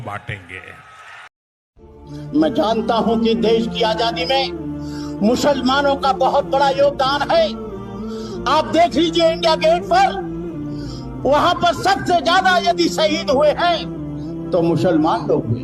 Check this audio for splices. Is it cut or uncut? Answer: cut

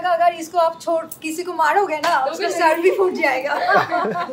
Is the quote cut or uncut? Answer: uncut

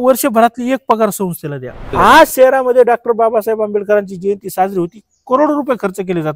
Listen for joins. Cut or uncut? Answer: cut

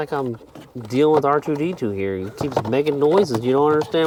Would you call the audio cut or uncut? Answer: uncut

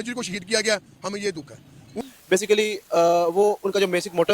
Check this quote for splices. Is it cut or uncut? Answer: cut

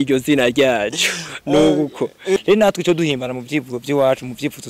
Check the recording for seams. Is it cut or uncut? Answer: cut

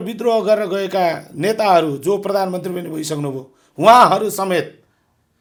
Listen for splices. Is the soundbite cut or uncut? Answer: uncut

